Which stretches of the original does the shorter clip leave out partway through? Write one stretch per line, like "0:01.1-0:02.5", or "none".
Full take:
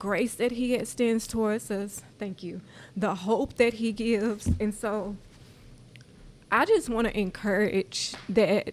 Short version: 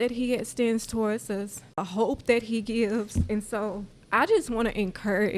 0:02.2-0:03.1
0:05.2-0:06.3